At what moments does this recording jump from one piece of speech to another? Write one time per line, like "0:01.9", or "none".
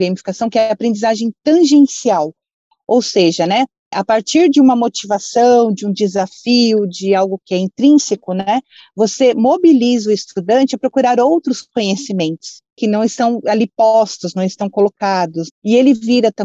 none